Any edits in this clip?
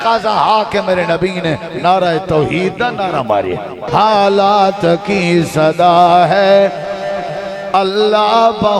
yes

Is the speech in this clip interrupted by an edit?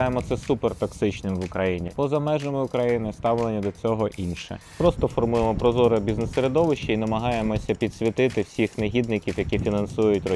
yes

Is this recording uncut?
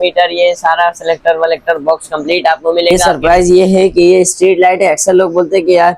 no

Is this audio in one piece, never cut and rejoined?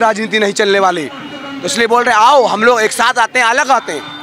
yes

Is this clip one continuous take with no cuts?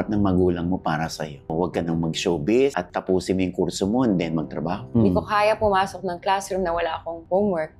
no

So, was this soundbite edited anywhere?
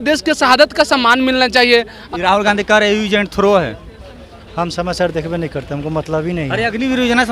yes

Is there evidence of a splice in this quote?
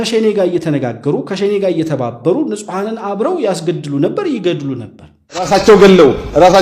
yes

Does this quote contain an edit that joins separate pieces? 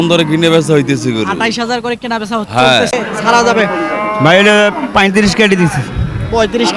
yes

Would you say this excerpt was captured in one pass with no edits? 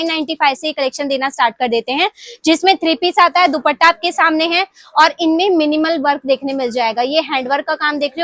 yes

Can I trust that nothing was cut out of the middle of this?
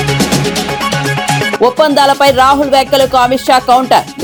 yes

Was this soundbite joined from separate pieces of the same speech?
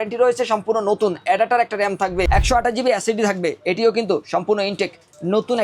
yes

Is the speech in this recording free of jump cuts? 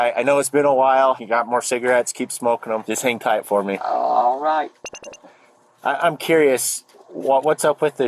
no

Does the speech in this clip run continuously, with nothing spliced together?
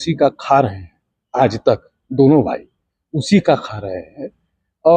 yes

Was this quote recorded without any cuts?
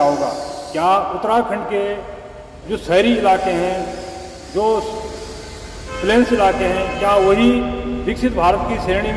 yes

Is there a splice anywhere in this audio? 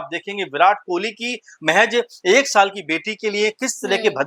no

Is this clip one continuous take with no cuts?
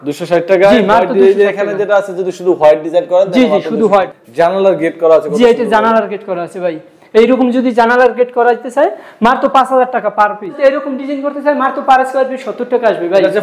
no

